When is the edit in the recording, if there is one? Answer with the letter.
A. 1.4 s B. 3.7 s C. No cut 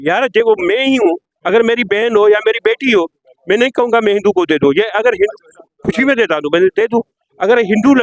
C